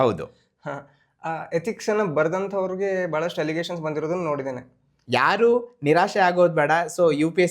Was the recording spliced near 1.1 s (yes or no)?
no